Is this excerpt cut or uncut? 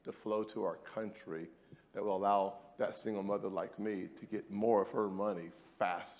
uncut